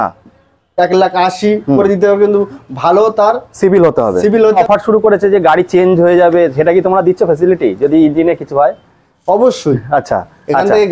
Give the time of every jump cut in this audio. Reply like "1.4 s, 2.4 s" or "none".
4.6 s